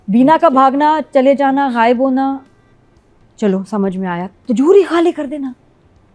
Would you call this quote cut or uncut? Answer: uncut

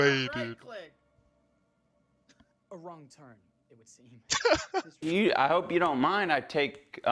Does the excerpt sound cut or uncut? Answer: cut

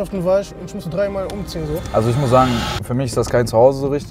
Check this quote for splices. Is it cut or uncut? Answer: cut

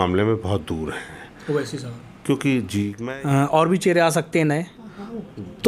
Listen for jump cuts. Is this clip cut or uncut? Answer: cut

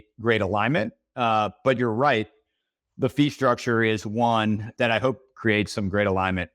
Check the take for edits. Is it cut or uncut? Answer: cut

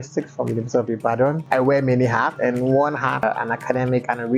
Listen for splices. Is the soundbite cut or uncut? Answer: cut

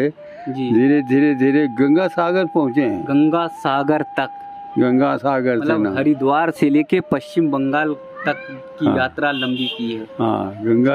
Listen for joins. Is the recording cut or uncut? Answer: uncut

